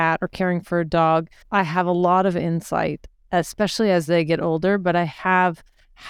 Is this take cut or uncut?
cut